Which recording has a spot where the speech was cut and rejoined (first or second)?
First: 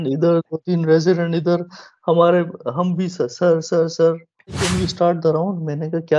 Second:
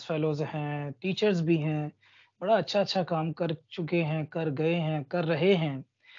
first